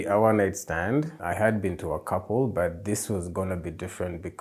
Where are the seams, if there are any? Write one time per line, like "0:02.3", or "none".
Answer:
0:01.2